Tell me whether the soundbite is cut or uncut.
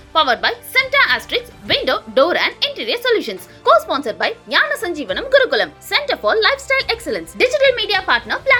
uncut